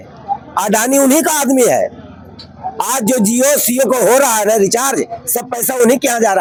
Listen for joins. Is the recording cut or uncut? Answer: uncut